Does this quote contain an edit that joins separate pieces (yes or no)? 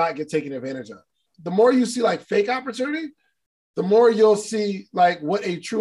yes